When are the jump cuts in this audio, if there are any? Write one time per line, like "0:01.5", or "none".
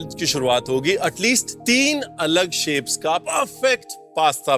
0:01.5
0:03.3